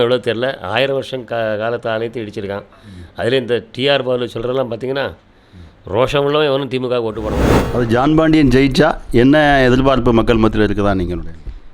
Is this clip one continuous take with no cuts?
no; 1 cut; at 7.5 s

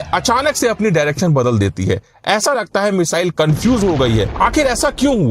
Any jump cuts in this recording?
yes; 1 cut; at 4.3 s

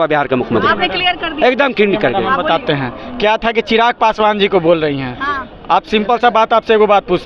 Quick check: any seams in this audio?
no; 0 cuts

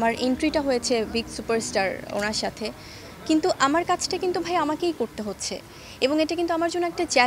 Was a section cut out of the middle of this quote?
no; 0 cuts

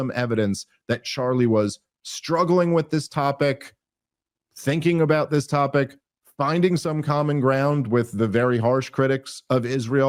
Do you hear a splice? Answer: no; 0 cuts

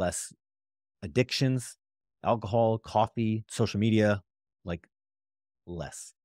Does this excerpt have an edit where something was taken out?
no; 0 cuts

